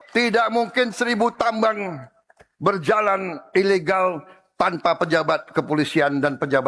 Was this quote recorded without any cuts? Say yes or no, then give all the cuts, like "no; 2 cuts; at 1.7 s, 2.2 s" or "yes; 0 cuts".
yes; 0 cuts